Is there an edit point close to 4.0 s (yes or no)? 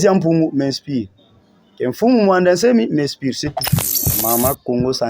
yes